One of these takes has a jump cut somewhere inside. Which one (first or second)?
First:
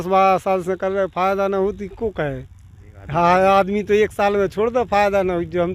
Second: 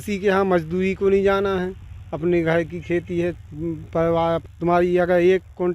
second